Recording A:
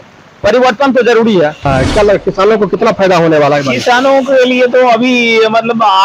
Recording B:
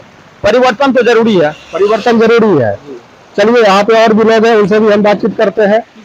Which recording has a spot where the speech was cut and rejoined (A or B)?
A